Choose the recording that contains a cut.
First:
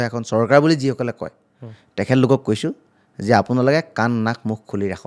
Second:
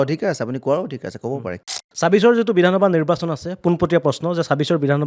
second; 1 cut; at 1.5 s

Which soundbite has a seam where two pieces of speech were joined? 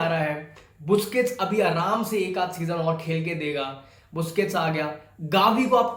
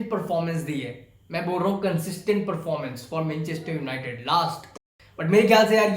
second; 1 cut; at 4.8 s

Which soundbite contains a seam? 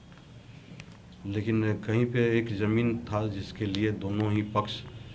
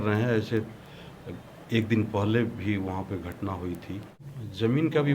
second; 1 cut; at 4.2 s

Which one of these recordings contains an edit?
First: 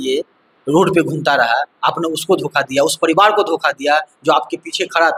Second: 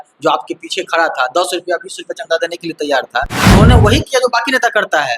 second; 1 cut; at 3.5 s

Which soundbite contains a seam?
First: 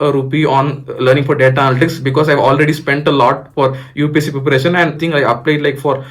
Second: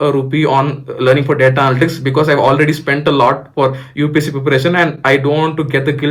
first; 1 cut; at 5.0 s

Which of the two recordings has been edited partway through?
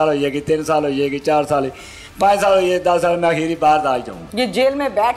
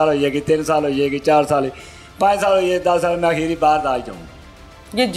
first; 1 cut; at 4.2 s

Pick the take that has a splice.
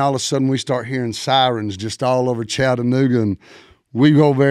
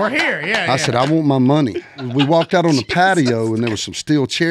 second; 1 cut; at 2.1 s

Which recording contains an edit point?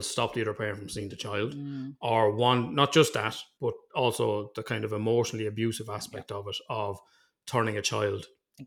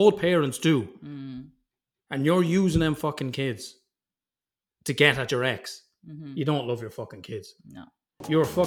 first; 1 cut; at 3.4 s

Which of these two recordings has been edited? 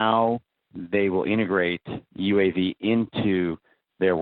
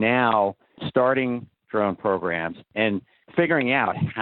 second; 2 cuts; at 0.8 s, 3.2 s

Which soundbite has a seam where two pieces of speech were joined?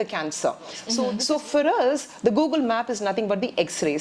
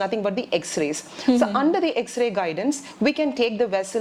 first; 1 cut; at 1.1 s

